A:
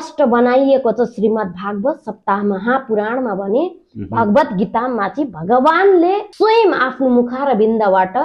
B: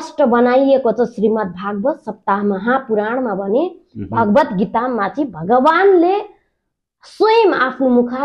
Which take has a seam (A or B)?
A